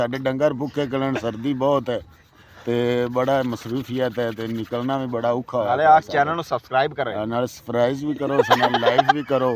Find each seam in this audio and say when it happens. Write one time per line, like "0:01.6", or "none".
0:08.6